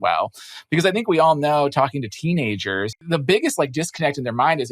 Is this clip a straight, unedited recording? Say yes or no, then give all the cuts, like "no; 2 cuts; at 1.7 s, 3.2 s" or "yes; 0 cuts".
no; 1 cut; at 3.0 s